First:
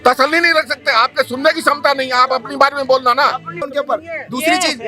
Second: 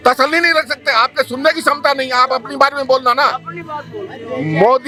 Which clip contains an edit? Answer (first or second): first